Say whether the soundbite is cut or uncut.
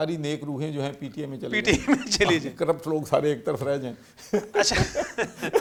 uncut